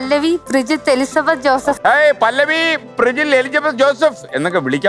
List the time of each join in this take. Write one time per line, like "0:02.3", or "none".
0:01.8